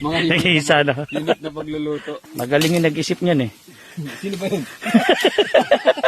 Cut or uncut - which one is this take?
cut